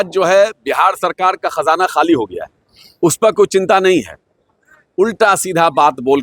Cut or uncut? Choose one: uncut